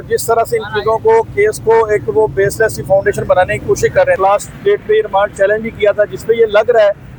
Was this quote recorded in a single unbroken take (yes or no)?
no